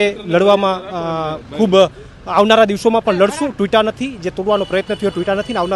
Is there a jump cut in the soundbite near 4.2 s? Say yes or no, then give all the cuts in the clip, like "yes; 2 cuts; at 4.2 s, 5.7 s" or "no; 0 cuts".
no; 0 cuts